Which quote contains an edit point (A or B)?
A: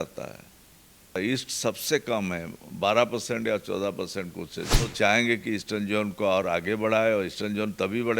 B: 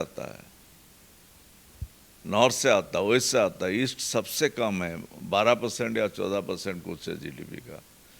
A